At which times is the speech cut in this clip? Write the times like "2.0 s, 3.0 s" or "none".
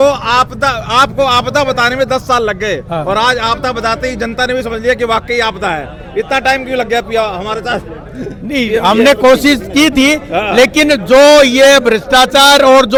none